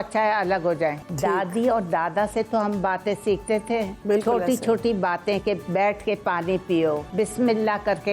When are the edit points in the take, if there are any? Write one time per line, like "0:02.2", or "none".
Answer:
0:01.1
0:03.9
0:07.1